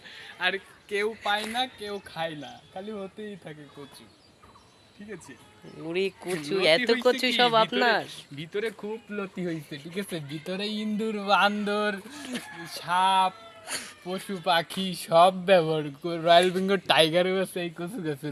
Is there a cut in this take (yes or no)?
no